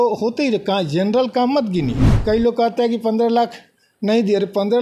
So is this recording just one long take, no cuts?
no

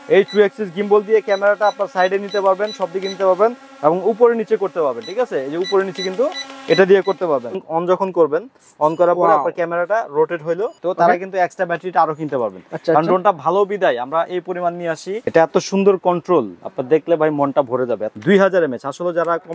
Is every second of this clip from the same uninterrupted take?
no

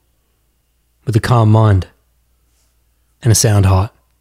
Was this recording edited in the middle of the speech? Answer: no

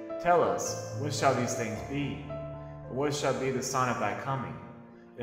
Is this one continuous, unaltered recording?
yes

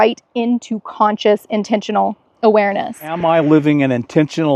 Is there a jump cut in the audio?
yes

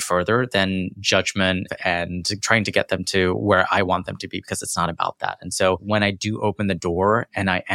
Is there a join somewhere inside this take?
yes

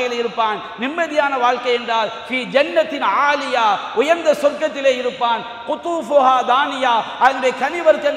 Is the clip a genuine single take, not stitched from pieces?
yes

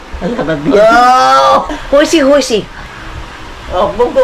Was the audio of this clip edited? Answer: yes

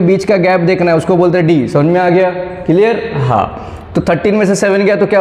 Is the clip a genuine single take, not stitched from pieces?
yes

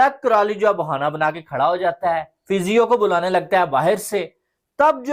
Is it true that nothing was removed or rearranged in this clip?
no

